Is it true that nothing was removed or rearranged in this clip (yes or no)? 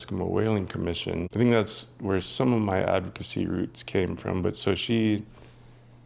no